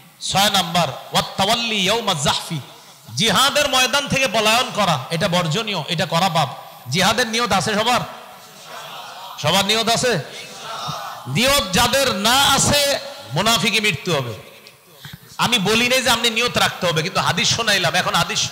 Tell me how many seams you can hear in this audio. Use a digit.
0